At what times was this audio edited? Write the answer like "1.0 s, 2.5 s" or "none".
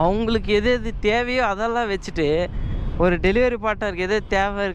none